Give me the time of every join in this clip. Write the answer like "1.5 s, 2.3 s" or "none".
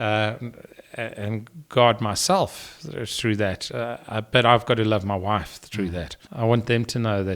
6.2 s